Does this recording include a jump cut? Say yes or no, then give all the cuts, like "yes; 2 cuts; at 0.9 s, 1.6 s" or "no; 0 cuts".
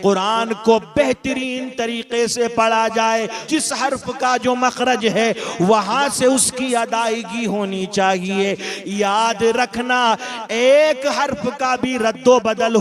yes; 1 cut; at 3.4 s